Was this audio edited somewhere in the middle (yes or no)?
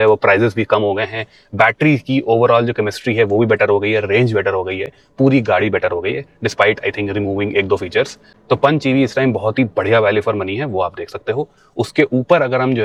no